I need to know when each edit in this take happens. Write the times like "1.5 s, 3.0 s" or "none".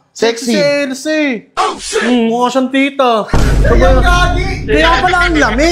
none